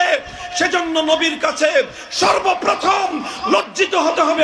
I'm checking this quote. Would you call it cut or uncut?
uncut